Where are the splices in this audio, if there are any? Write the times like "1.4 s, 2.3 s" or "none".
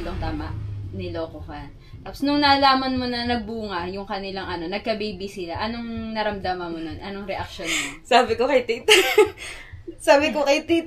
none